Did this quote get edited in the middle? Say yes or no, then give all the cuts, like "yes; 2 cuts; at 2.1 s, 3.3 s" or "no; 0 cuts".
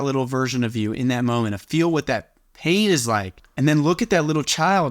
yes; 1 cut; at 3.4 s